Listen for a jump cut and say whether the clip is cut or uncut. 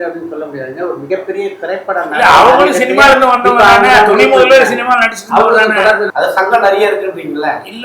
cut